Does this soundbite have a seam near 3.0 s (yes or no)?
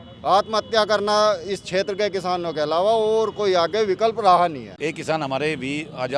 no